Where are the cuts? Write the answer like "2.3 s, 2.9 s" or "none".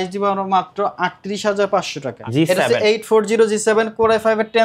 2.2 s